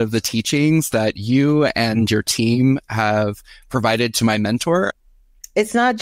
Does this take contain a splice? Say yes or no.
yes